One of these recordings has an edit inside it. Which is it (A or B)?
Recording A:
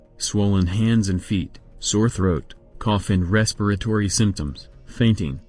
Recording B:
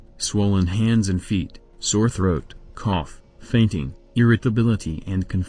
B